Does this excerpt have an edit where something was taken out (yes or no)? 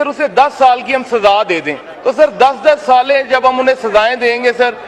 yes